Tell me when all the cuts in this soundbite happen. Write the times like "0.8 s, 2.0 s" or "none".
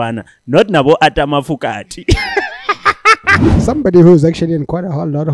3.4 s